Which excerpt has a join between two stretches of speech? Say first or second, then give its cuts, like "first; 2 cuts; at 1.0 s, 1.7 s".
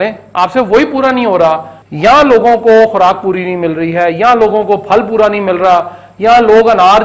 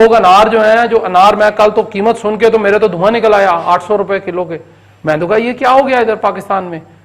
first; 1 cut; at 1.8 s